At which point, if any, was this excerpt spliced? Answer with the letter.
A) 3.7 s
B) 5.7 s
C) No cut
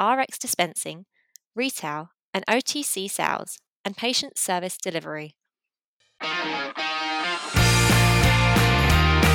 B